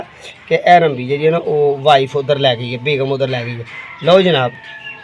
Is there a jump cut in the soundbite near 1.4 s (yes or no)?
no